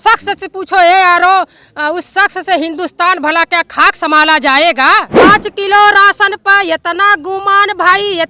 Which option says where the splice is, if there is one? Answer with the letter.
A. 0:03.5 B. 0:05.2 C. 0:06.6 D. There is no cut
B